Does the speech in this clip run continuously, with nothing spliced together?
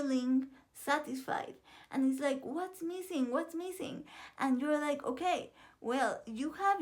yes; 0 cuts

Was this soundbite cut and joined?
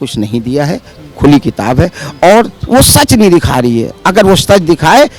yes; 1 cut; at 2.6 s

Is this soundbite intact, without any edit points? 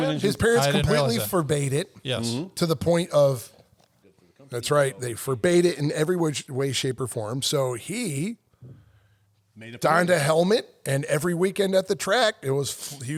no; 1 cut; at 4.4 s

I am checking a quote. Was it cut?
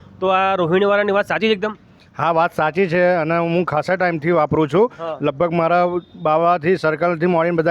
no; 0 cuts

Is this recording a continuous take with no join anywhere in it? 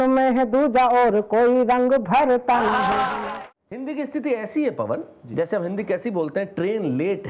no; 1 cut; at 3.3 s

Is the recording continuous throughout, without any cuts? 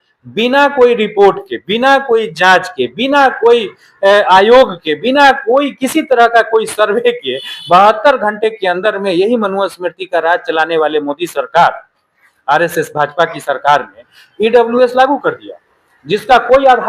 yes; 0 cuts

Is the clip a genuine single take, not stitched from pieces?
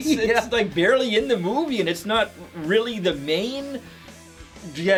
yes; 0 cuts

